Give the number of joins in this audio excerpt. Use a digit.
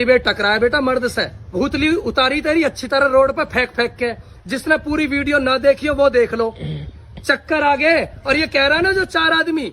1